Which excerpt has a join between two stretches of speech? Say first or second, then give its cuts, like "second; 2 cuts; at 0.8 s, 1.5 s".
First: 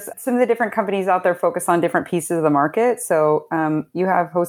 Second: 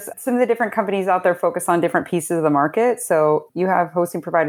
second; 1 cut; at 3.5 s